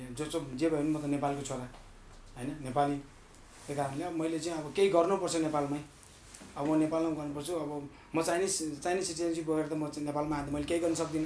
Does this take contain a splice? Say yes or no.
no